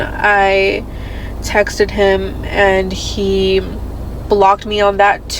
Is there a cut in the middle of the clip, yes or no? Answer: no